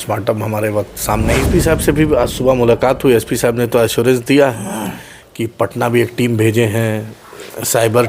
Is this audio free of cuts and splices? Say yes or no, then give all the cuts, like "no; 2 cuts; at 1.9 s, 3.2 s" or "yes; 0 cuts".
no; 1 cut; at 1.4 s